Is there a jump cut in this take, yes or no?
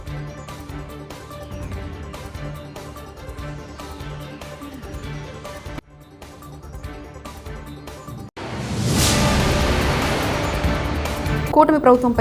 no